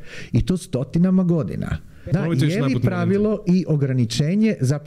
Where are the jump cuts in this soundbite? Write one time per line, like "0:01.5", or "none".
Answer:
0:02.1

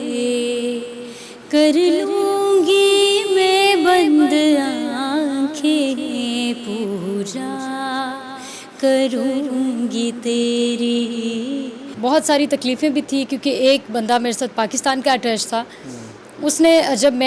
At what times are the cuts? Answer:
0:11.8

